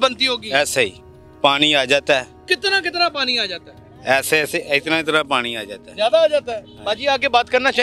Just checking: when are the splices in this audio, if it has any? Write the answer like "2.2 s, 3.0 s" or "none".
none